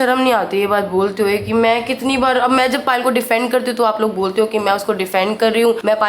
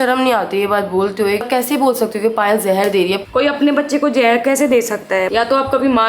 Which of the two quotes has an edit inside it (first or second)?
second